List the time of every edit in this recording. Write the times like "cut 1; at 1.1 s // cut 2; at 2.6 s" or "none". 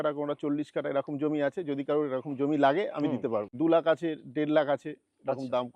cut 1; at 3.5 s